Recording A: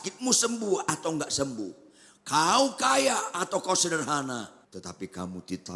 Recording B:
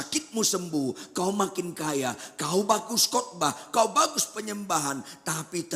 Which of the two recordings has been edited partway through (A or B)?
A